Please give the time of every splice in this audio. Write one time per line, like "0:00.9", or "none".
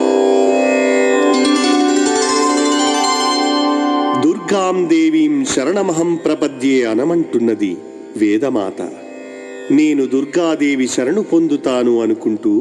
0:01.1